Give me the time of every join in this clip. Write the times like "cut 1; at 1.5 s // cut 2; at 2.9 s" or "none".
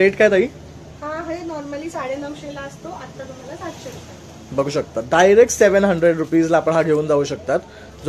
none

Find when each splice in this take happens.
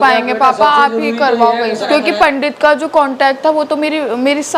cut 1; at 1.8 s

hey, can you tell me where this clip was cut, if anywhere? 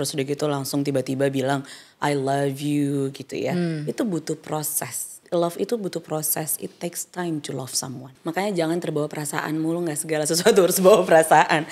cut 1; at 5.2 s // cut 2; at 8.2 s

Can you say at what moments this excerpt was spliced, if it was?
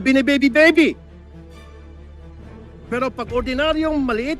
none

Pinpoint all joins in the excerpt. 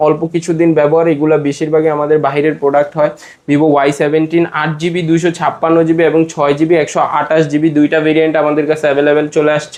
none

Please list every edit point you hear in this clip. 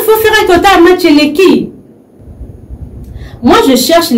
cut 1; at 2.2 s

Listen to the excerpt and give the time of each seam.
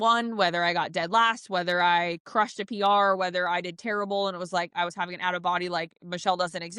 none

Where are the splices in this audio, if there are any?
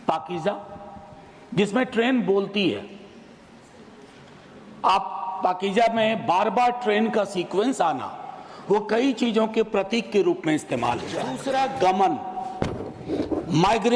cut 1; at 11.4 s

